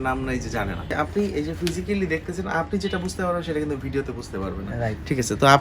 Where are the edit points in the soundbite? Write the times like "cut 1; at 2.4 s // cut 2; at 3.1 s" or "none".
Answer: cut 1; at 0.9 s